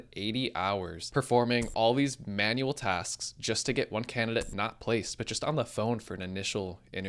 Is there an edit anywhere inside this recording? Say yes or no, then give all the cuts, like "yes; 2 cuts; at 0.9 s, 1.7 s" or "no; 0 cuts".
yes; 1 cut; at 1.0 s